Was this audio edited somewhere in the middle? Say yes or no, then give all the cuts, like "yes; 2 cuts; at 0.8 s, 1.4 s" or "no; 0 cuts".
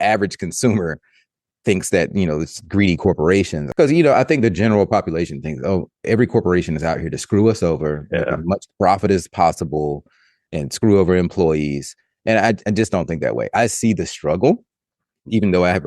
yes; 1 cut; at 3.6 s